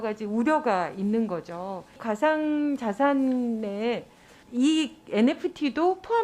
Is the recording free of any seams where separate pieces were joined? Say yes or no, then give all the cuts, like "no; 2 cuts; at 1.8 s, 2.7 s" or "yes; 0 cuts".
no; 1 cut; at 2.0 s